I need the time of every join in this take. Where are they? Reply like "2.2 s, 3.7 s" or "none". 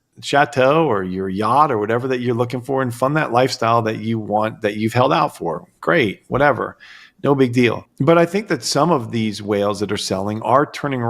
7.9 s